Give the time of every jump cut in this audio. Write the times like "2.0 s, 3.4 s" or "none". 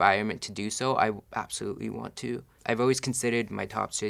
2.5 s